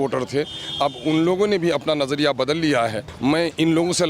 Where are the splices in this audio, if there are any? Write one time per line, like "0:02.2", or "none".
0:03.1